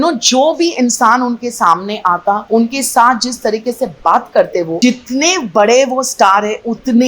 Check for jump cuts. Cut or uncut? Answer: cut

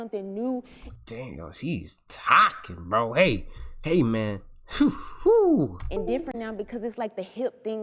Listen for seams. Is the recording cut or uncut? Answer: uncut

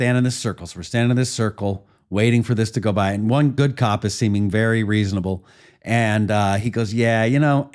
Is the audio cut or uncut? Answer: cut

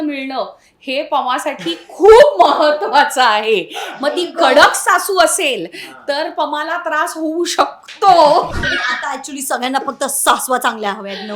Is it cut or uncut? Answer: cut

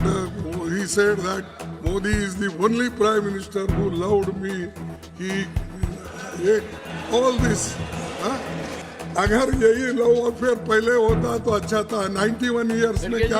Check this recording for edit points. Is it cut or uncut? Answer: cut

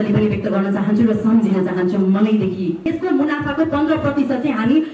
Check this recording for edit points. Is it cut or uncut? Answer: cut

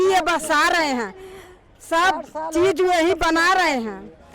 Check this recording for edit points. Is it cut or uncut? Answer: uncut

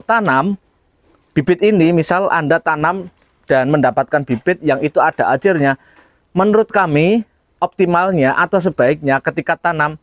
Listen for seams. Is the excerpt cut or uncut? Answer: uncut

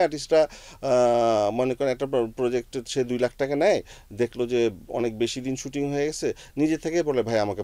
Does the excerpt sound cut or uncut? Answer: uncut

